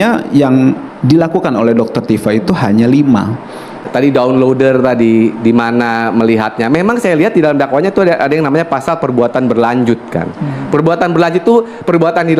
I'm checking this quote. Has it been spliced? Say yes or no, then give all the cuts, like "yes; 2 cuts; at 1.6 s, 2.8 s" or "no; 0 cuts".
no; 0 cuts